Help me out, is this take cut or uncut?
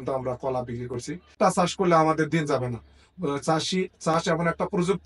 cut